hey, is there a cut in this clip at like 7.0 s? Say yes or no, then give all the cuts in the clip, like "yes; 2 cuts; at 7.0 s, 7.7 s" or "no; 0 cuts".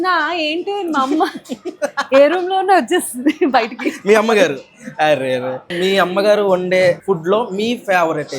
yes; 2 cuts; at 5.7 s, 7.0 s